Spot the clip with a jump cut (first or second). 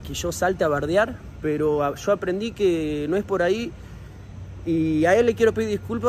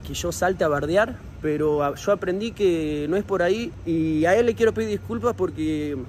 second